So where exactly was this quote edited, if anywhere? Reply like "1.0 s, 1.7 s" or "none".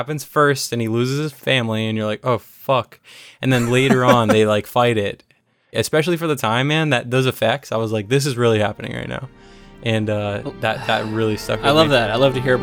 1.3 s, 5.7 s